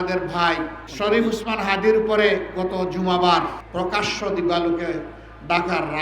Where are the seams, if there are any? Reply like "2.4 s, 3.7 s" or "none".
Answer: 3.6 s